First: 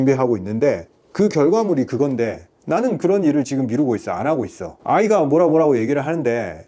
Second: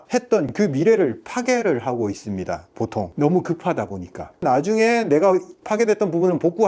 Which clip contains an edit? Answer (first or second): second